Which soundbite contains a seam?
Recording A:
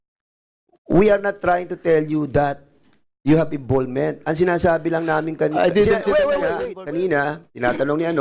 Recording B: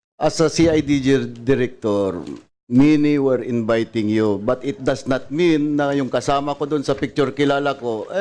A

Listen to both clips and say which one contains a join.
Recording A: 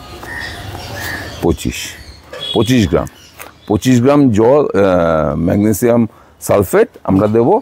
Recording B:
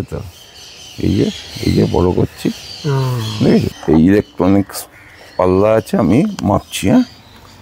B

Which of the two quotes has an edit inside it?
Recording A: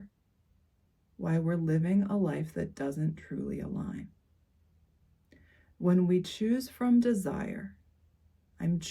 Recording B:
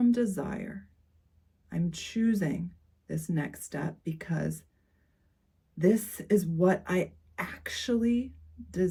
A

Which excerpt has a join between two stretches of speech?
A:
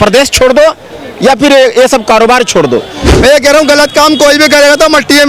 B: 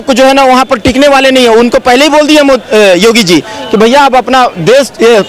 A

